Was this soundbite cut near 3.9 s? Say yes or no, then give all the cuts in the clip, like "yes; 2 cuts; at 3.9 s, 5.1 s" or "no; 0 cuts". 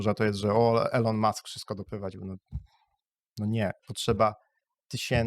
yes; 1 cut; at 3.9 s